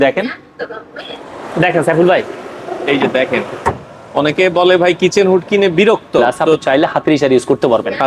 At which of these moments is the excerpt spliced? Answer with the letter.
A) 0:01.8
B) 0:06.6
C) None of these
B